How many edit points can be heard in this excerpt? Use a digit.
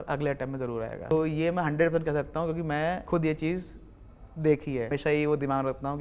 3